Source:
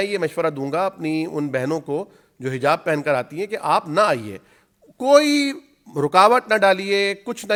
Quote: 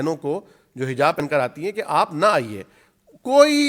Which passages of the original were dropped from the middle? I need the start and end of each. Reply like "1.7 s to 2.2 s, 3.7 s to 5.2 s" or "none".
2.8 s to 2.9 s